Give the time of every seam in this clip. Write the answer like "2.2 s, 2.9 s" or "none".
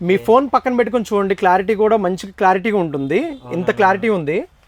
none